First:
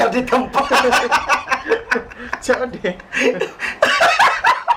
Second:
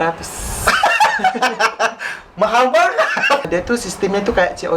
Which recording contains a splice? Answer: second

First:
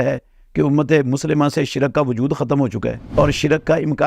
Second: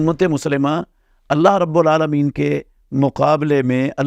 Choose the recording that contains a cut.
first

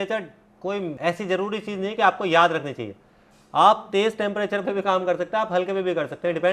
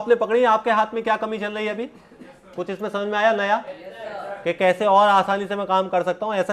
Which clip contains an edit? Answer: first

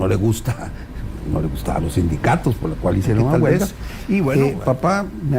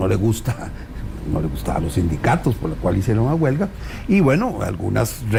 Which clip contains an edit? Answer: first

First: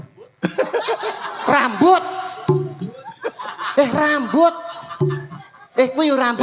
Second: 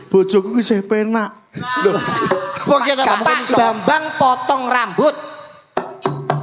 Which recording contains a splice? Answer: second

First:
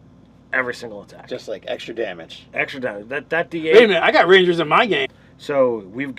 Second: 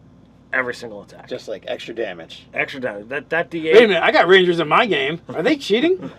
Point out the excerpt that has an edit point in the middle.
second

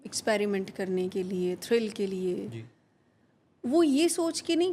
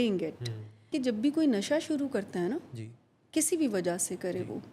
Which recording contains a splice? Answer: second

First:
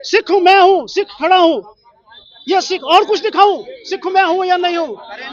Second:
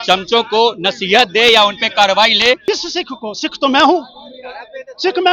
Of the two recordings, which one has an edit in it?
second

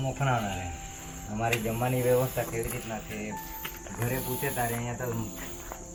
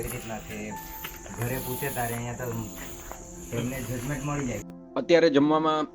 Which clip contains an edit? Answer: second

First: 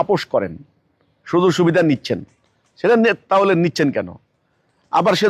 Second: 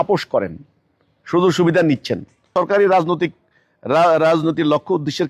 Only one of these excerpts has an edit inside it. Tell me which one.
second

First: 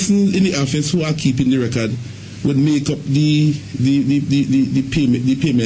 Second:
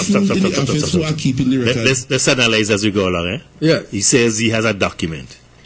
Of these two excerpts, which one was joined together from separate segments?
first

